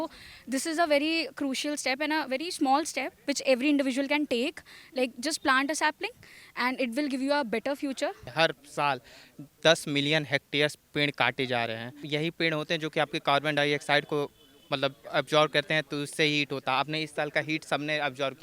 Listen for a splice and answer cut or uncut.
cut